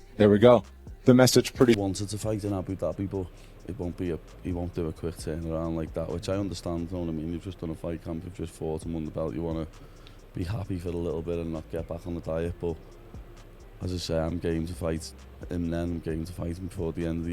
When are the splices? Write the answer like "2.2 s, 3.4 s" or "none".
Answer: 1.8 s